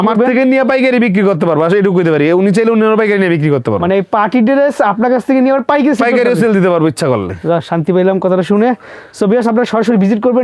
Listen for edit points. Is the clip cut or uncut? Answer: uncut